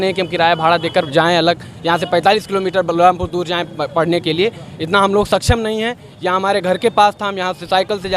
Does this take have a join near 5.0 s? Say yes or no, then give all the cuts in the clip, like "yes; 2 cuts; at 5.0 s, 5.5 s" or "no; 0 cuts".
no; 0 cuts